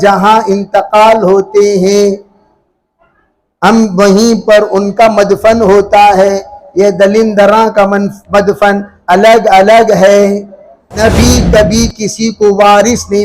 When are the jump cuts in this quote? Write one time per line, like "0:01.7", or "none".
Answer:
0:11.0

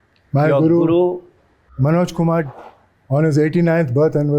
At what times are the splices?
none

